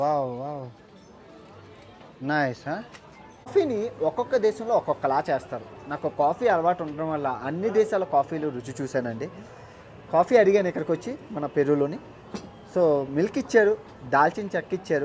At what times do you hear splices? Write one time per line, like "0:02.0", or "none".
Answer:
0:03.5